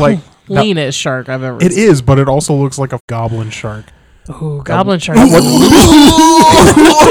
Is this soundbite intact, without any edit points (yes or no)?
no